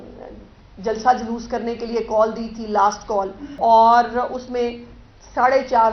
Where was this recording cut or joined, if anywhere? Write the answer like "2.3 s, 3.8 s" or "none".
3.4 s

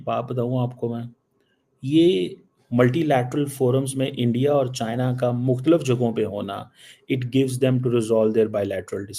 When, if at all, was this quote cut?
none

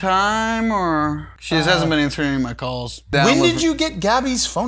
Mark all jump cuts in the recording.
1.3 s, 3.1 s

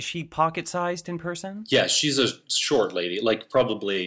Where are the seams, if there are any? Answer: 1.6 s

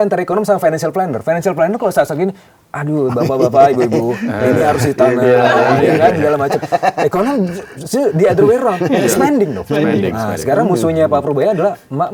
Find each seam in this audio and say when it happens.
none

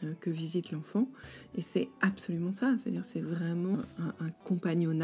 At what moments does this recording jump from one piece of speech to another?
3.7 s

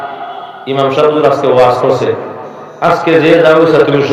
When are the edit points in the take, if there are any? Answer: none

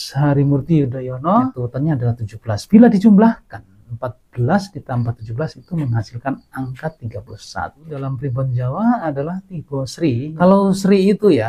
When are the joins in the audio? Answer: 1.6 s, 8.1 s, 10.3 s

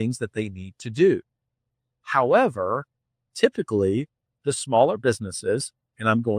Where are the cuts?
none

